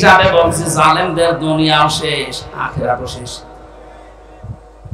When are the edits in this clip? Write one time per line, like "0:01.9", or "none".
none